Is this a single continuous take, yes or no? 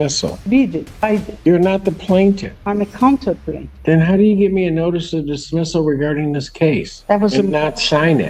yes